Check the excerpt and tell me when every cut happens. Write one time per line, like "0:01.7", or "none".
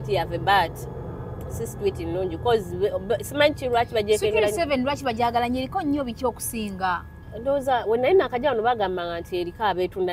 none